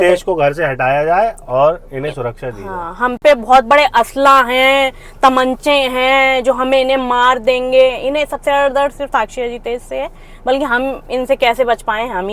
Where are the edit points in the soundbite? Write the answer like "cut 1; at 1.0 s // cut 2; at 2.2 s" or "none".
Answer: none